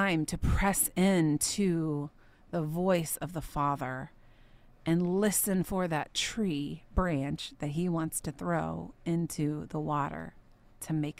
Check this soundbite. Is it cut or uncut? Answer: uncut